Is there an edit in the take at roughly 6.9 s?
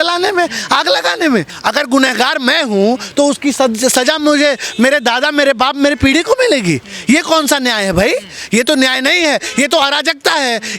no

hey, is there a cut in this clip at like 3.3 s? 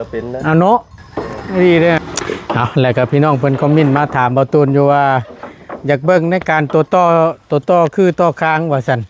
no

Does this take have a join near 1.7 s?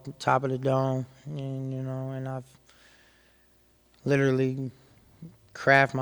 no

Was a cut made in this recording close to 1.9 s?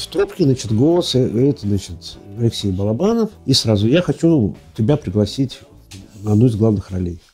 no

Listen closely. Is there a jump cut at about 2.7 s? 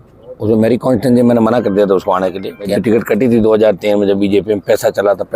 yes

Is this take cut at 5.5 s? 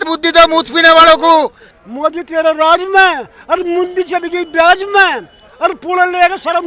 no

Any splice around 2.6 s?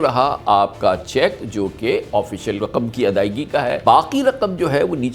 yes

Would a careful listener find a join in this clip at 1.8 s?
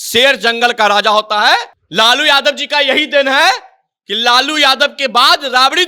yes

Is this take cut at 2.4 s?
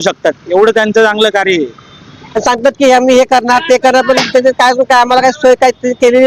yes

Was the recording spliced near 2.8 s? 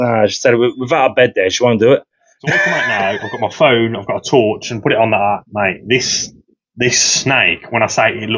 yes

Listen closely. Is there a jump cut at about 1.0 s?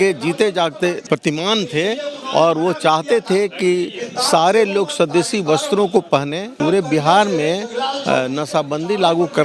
yes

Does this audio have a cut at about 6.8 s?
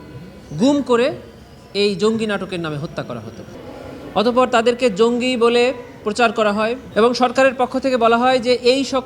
yes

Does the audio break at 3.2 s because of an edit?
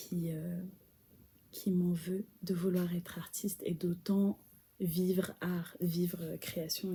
no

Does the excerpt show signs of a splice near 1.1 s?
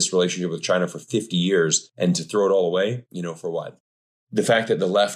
no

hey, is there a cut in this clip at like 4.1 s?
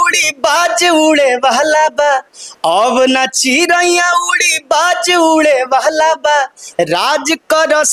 no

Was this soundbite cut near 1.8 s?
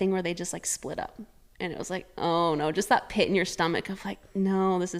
no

